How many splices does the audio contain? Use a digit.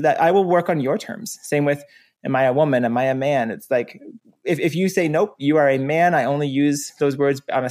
0